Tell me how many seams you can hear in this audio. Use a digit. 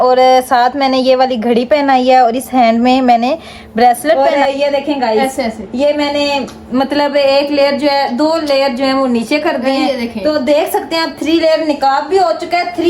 1